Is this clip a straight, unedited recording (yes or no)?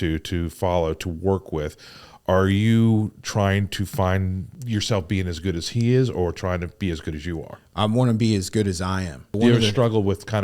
no